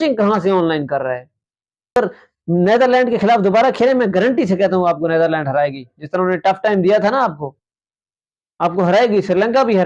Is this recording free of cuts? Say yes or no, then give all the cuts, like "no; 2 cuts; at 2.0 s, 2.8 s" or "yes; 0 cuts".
no; 1 cut; at 2.0 s